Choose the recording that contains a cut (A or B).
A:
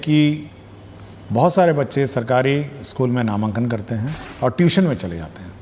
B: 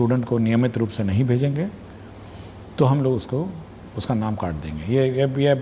A